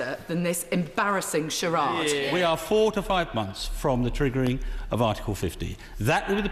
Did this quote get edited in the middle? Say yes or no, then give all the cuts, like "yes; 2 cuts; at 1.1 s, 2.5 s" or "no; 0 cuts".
yes; 1 cut; at 2.3 s